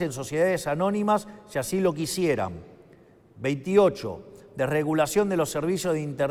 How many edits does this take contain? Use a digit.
0